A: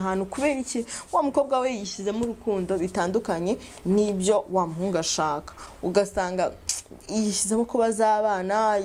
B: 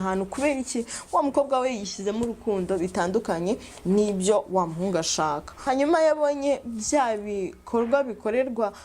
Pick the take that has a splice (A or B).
B